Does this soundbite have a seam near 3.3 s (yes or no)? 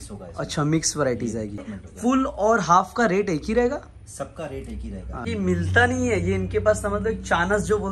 no